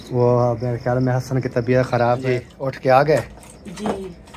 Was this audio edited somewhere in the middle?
yes; 1 cut; at 2.2 s

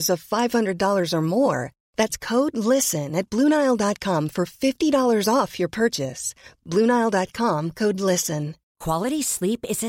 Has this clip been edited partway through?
no; 0 cuts

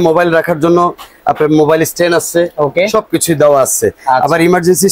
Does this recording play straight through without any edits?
yes; 0 cuts

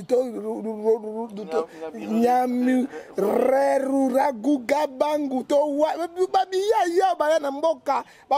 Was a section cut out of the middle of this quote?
no; 0 cuts

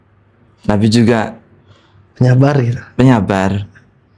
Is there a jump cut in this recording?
no; 0 cuts

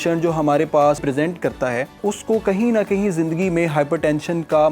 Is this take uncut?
no; 2 cuts; at 1.0 s, 2.0 s

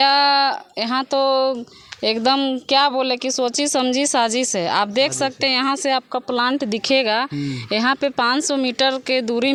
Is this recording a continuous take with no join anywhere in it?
yes; 0 cuts

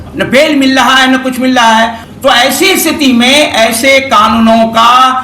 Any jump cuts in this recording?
yes; 1 cut; at 2.0 s

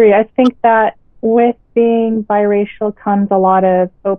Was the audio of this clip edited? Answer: no; 0 cuts

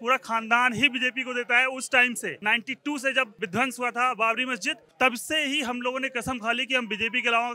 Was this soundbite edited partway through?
yes; 3 cuts; at 2.4 s, 3.3 s, 4.8 s

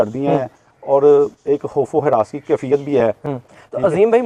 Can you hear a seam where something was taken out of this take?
no; 0 cuts

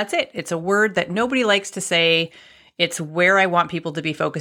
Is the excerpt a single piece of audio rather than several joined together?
yes; 0 cuts

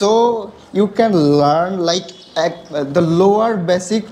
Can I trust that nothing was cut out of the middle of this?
yes; 0 cuts

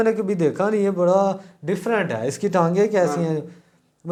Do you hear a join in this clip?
no; 0 cuts

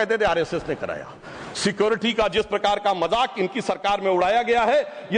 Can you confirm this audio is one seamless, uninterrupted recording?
yes; 0 cuts

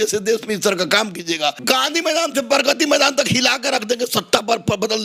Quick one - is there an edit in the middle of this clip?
yes; 1 cut; at 1.6 s

